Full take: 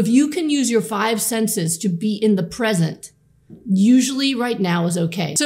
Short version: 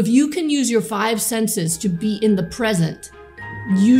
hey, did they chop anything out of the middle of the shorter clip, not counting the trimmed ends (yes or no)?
no